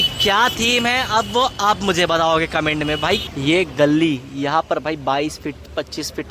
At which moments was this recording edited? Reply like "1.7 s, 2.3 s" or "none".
3.3 s